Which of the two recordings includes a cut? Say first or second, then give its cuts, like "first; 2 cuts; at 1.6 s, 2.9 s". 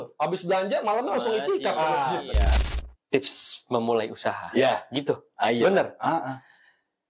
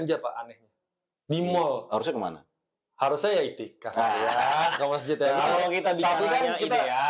first; 1 cut; at 2.6 s